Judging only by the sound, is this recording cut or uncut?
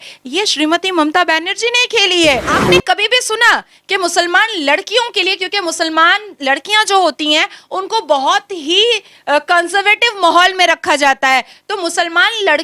cut